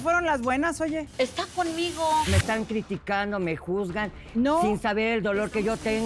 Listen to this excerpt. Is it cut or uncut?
cut